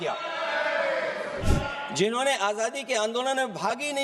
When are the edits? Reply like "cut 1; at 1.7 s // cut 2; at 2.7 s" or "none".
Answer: cut 1; at 1.4 s